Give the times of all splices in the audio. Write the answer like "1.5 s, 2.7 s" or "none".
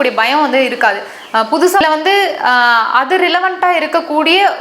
1.8 s